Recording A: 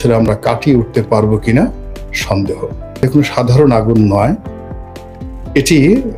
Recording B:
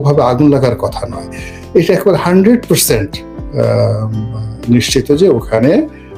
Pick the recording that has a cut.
A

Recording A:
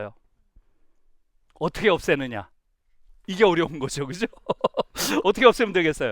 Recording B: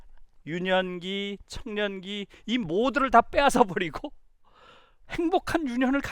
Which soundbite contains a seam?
A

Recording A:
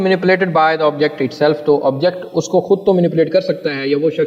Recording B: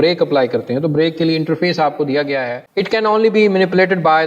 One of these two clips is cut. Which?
B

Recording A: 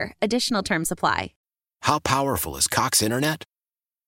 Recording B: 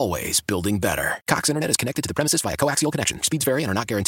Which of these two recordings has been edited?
A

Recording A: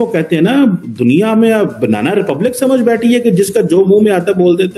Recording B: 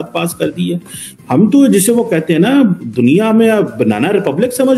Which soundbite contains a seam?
B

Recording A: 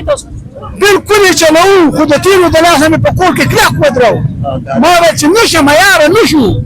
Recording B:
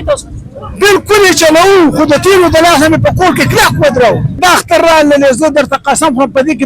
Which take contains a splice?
B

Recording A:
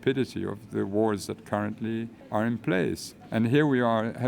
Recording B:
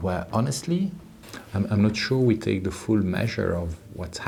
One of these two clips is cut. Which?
A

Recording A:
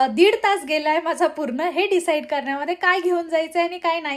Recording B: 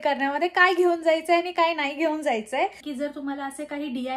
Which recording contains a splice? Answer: B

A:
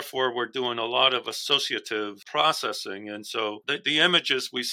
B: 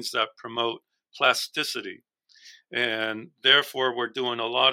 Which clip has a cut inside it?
A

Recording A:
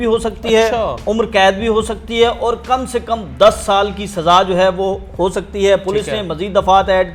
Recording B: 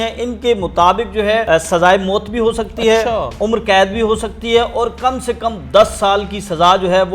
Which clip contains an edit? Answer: B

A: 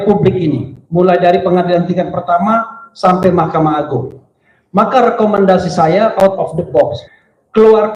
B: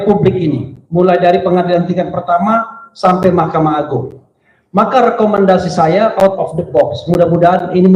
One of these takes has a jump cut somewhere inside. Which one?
A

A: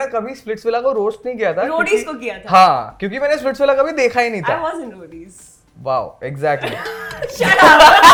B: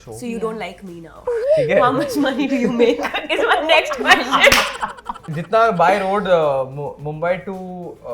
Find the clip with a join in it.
B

